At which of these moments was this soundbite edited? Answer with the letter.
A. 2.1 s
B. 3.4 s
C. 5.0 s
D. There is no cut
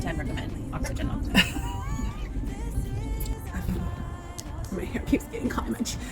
B